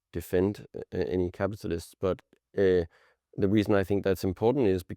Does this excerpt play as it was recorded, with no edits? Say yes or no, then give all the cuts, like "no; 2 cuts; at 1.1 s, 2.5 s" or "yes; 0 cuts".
yes; 0 cuts